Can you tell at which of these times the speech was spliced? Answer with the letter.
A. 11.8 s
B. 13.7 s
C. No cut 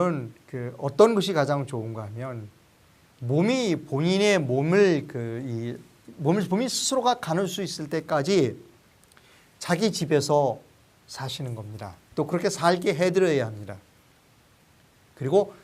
A